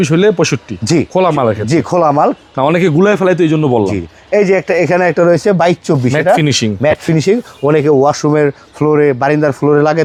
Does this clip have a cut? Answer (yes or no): no